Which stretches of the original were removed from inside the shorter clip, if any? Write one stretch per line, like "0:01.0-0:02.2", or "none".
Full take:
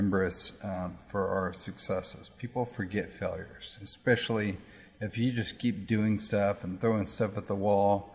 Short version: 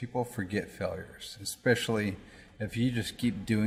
none